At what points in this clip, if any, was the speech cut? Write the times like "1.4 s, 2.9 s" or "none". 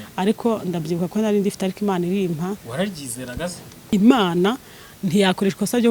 3.9 s